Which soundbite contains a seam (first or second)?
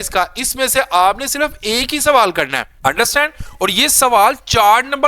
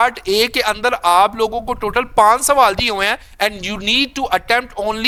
first